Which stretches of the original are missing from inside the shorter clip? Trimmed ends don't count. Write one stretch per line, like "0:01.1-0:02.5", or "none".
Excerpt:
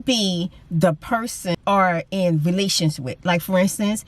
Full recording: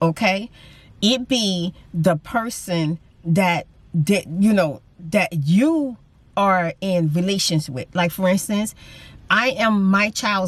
0:02.8-0:06.2